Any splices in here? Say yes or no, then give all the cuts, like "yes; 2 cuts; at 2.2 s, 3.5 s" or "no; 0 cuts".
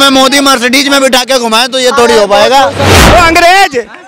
yes; 1 cut; at 2.9 s